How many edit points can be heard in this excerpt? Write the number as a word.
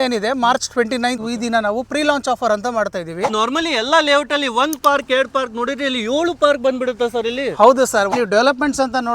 three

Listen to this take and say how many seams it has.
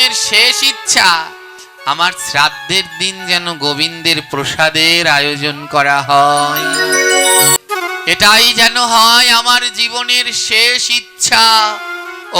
one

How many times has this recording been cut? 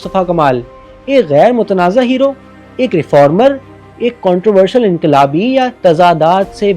one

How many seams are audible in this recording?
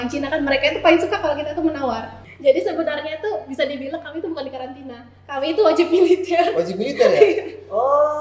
one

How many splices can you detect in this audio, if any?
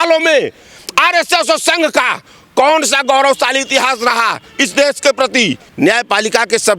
one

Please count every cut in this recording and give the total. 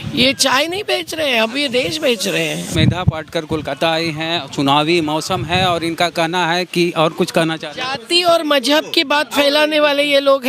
one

